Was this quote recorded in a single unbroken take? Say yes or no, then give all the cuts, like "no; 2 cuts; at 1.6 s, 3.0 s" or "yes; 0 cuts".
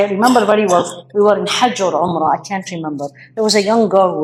yes; 0 cuts